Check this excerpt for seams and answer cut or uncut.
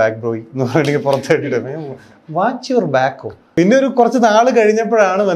cut